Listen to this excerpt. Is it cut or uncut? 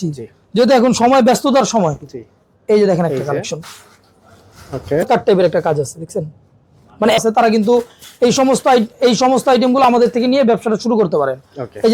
cut